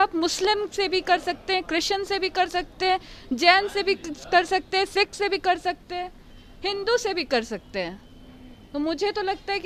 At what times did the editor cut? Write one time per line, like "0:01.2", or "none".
none